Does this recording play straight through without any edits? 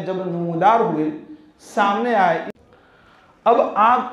no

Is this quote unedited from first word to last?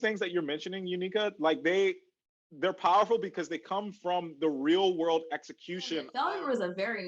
no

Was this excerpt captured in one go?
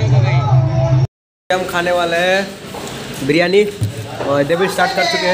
no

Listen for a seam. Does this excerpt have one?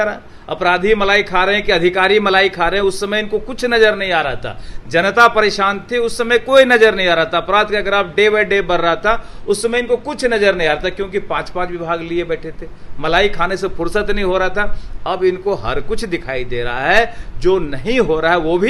no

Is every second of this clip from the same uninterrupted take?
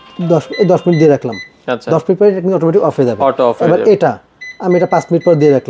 yes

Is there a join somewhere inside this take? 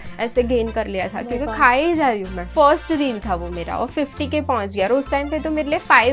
yes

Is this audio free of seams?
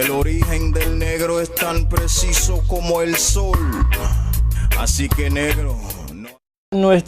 no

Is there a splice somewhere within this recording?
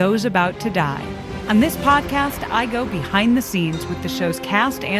yes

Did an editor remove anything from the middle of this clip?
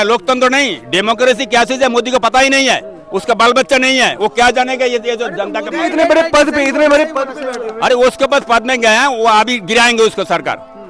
no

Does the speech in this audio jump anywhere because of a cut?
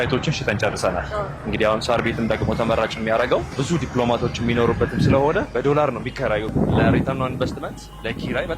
yes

